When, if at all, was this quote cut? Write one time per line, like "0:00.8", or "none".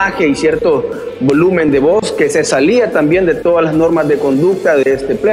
none